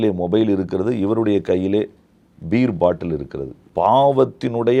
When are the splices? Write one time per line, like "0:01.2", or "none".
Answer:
0:03.6